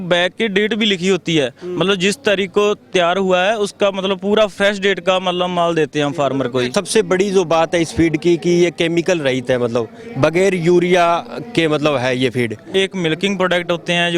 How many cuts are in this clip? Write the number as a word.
two